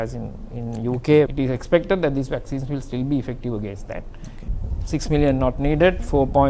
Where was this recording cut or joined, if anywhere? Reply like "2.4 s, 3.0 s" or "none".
1.3 s, 4.5 s